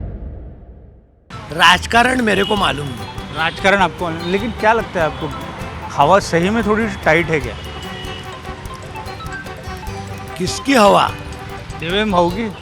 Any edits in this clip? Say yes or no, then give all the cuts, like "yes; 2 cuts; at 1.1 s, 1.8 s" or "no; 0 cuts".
yes; 1 cut; at 1.3 s